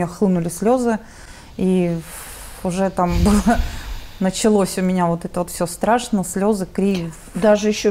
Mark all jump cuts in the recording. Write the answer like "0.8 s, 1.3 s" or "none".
none